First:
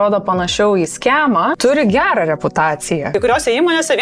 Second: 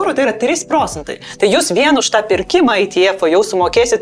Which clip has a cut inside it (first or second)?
first